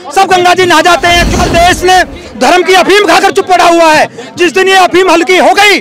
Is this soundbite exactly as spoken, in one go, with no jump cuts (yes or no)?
no